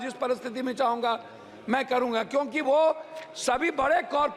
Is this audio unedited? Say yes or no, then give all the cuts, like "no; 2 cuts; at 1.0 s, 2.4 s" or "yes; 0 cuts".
yes; 0 cuts